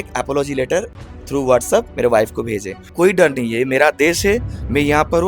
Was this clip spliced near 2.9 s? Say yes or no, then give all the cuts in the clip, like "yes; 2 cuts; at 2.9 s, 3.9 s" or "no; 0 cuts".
yes; 1 cut; at 2.9 s